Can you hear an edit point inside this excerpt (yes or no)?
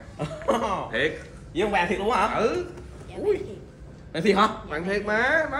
no